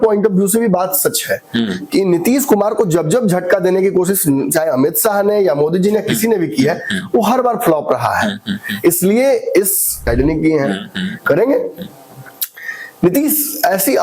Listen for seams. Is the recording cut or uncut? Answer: cut